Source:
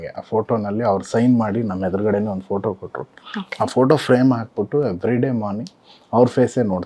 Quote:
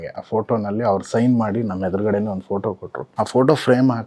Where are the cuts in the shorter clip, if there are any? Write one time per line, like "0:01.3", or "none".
0:03.0